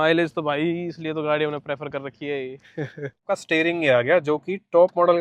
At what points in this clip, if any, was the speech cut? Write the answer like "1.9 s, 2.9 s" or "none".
3.3 s